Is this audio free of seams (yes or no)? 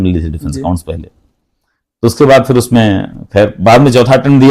yes